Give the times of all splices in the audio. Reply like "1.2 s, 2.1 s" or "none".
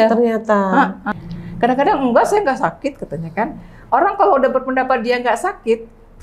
1.1 s

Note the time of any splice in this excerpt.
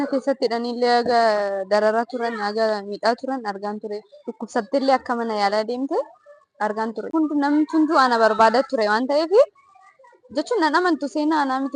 7.1 s

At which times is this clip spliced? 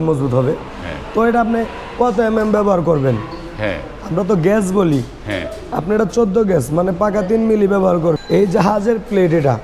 8.2 s

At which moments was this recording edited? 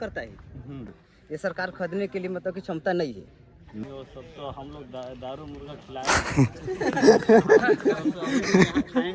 1.0 s, 3.8 s

